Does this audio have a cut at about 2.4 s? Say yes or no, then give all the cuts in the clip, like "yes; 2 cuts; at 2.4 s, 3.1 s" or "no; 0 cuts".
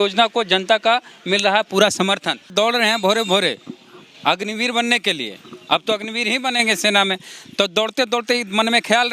yes; 1 cut; at 2.4 s